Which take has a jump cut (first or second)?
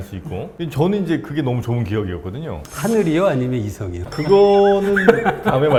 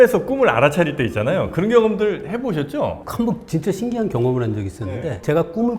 second